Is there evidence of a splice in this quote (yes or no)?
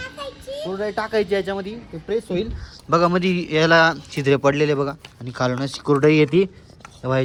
no